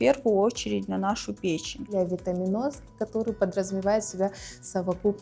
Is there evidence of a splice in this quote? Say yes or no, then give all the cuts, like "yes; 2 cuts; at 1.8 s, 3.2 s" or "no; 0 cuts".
yes; 1 cut; at 1.9 s